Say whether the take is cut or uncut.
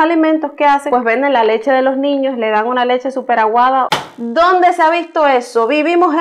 cut